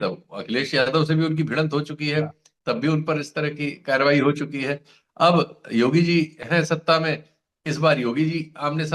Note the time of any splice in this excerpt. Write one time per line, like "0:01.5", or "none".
none